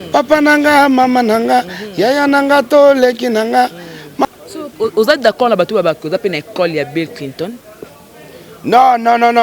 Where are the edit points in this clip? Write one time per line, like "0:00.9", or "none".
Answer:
0:04.2